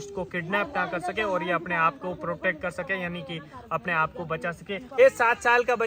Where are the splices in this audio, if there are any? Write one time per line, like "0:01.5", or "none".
0:04.9